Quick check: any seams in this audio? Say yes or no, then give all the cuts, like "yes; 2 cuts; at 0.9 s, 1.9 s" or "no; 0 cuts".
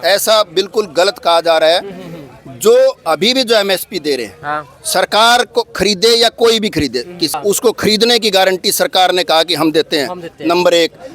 yes; 1 cut; at 7.3 s